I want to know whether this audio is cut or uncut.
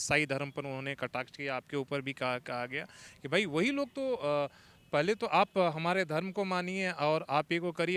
uncut